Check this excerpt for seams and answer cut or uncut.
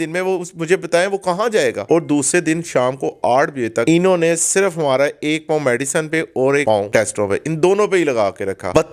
cut